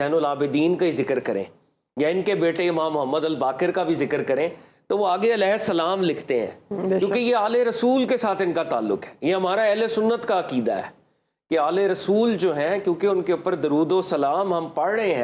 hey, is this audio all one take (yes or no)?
yes